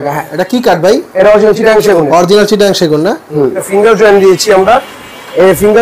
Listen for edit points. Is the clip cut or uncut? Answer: cut